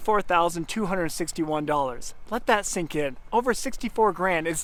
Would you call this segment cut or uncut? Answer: uncut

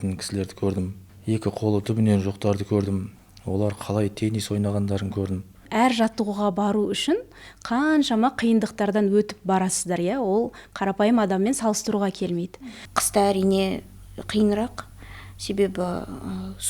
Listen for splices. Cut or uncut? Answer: cut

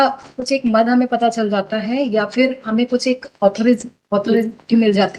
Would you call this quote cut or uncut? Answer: uncut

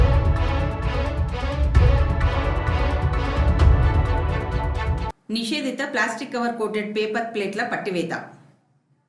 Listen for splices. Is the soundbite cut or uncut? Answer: uncut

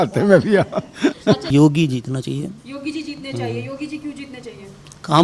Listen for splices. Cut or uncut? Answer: cut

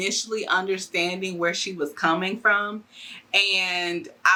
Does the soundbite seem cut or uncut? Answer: uncut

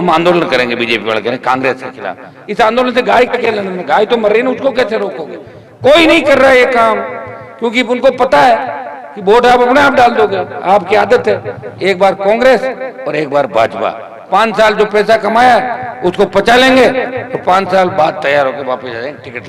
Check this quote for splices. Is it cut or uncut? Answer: uncut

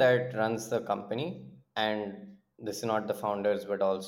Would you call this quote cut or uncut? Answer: uncut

